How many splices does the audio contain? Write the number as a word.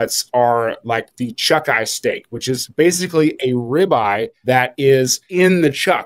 two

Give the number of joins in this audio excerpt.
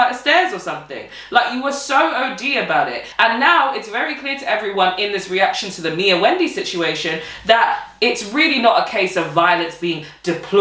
one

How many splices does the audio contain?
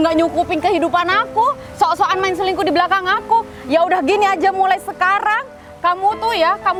zero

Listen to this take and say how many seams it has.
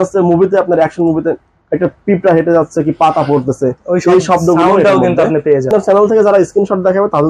one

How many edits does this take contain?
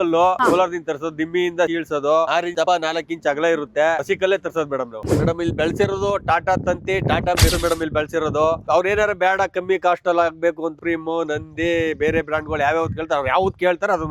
four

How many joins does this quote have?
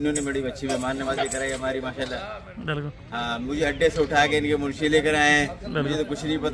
zero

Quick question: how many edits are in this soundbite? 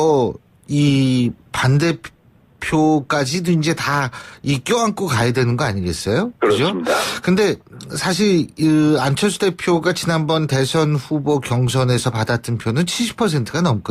one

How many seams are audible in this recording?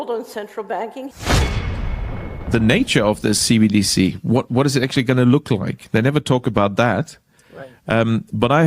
one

